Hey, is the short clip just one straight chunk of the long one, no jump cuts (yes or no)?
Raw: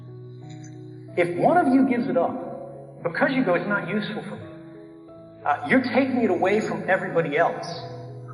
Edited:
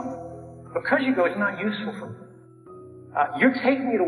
yes